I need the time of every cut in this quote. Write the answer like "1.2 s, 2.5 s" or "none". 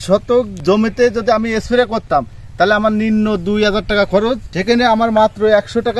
4.5 s